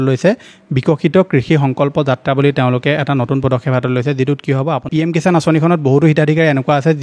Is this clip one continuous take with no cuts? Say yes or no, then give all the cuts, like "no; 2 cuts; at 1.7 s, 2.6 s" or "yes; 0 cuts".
no; 1 cut; at 4.8 s